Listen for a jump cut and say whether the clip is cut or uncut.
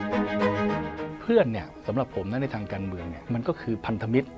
cut